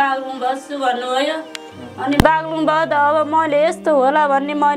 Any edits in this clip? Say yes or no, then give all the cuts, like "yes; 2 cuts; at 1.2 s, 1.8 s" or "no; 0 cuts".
no; 0 cuts